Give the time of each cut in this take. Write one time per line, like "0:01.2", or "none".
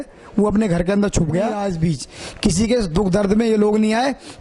0:01.6